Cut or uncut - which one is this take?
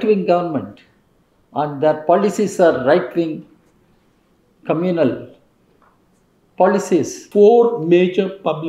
cut